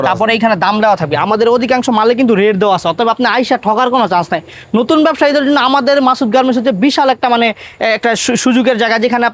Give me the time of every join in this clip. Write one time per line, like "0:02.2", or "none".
none